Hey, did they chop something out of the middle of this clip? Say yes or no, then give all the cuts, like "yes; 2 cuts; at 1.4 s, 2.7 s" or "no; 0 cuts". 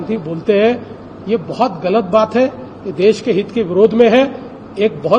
no; 0 cuts